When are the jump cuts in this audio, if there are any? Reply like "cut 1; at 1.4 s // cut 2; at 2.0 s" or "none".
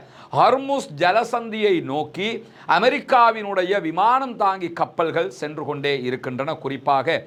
none